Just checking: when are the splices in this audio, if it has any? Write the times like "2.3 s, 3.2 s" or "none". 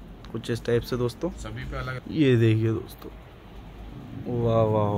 1.9 s